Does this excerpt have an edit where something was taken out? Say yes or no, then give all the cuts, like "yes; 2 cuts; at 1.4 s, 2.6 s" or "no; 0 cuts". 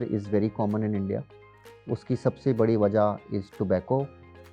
no; 0 cuts